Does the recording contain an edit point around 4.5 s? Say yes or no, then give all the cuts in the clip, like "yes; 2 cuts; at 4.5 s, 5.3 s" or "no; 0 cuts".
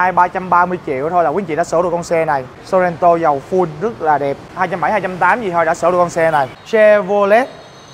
yes; 3 cuts; at 2.5 s, 4.5 s, 6.6 s